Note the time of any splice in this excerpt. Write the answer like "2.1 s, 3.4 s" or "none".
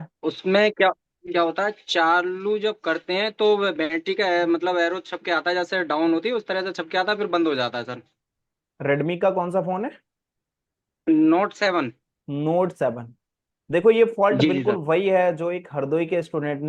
none